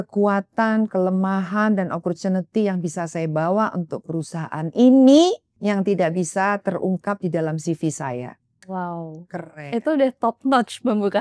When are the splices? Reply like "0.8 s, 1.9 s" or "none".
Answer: 5.5 s